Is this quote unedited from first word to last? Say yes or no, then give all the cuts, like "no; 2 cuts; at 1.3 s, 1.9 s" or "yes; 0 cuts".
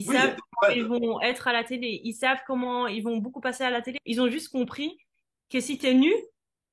no; 1 cut; at 4.0 s